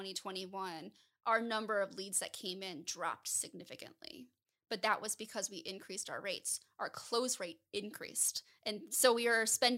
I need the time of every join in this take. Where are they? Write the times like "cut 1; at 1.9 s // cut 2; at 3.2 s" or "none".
none